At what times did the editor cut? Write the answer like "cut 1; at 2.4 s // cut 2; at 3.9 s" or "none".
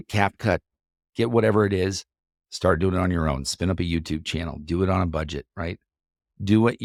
none